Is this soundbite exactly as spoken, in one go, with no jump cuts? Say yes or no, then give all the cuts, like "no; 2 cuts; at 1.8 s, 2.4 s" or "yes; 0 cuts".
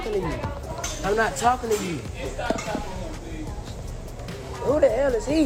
yes; 0 cuts